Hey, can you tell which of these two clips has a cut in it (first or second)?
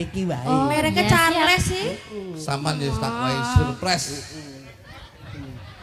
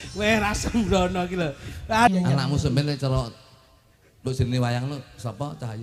second